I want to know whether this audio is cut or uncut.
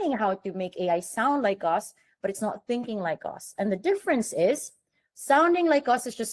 uncut